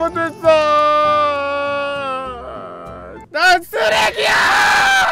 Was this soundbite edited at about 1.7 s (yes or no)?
no